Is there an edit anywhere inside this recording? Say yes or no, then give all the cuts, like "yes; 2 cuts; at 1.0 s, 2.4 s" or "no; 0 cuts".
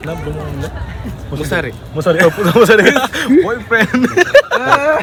no; 0 cuts